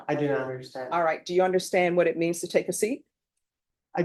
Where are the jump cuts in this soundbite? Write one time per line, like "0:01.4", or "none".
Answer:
none